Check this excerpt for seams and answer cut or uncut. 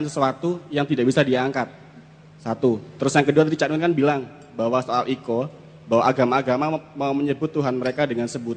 uncut